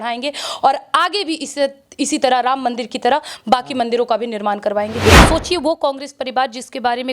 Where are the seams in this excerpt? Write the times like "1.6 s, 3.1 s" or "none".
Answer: 5.2 s

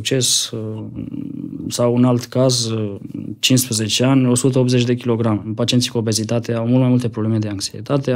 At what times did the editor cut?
5.5 s

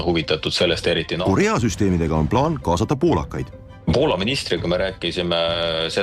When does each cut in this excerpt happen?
1.1 s

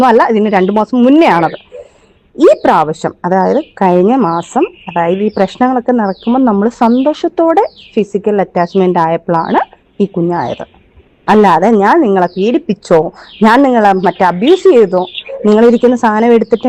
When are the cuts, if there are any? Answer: none

